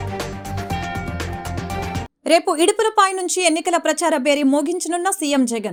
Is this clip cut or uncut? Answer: uncut